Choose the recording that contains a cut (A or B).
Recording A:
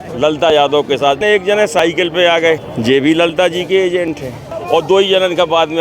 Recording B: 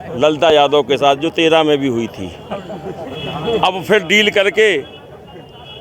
A